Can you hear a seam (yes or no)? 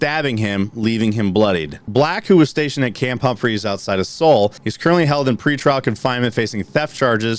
yes